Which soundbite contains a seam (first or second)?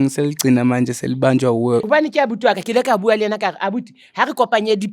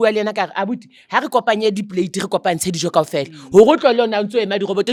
first